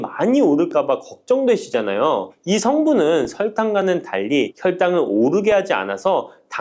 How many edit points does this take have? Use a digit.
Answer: 0